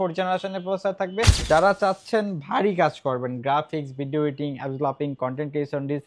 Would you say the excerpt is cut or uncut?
cut